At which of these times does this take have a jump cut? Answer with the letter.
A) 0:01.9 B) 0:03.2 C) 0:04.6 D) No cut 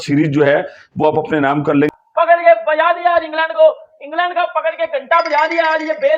A